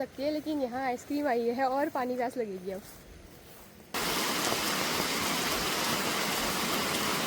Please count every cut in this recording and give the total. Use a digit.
0